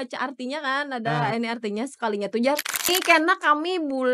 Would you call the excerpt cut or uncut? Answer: cut